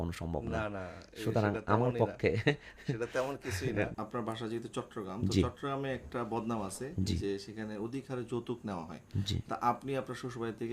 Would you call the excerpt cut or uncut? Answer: cut